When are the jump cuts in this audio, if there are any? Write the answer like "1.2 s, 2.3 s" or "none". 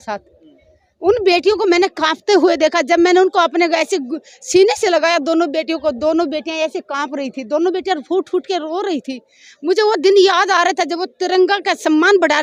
none